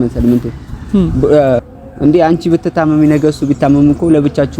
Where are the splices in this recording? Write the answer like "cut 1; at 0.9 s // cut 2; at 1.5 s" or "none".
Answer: cut 1; at 1.6 s